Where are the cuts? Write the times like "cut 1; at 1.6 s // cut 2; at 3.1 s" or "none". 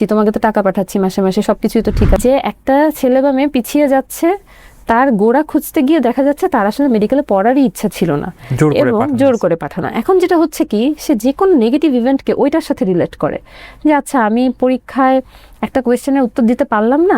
cut 1; at 2.2 s